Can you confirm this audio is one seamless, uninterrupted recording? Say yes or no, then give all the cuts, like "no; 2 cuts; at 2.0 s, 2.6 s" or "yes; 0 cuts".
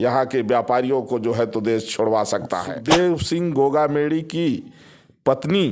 no; 1 cut; at 2.7 s